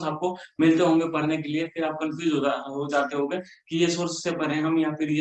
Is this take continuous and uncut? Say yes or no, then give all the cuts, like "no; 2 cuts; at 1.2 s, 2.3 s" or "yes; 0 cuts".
yes; 0 cuts